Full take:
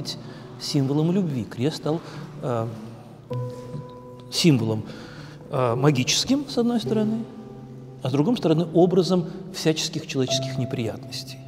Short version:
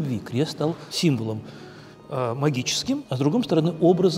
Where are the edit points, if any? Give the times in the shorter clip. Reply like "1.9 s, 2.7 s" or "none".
0.9 s, 3.1 s